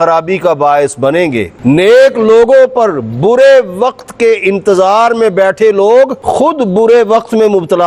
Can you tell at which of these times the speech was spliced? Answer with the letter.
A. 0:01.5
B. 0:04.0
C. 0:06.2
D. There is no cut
A